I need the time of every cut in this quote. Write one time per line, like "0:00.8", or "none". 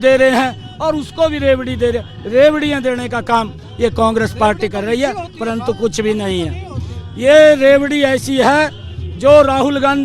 none